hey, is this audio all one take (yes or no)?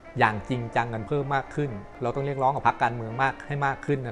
no